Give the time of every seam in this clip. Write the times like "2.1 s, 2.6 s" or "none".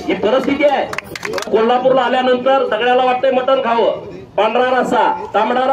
1.5 s